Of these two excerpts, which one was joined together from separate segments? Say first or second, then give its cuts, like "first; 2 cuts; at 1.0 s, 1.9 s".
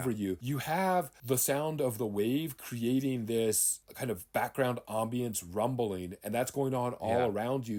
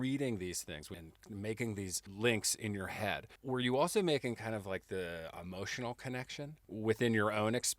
second; 3 cuts; at 0.9 s, 2.0 s, 3.3 s